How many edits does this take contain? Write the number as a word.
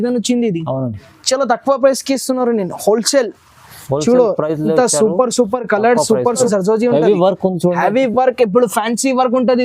one